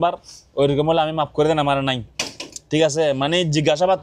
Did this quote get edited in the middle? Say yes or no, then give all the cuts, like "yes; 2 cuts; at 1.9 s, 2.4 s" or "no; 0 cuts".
no; 0 cuts